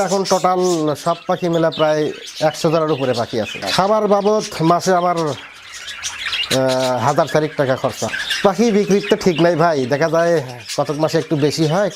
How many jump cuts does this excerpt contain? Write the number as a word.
two